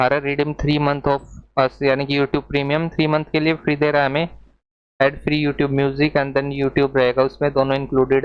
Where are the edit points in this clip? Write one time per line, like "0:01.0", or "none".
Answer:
none